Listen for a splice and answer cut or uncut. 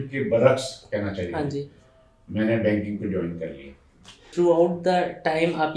cut